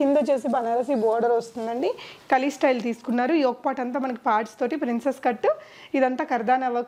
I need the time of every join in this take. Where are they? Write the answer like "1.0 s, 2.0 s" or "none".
none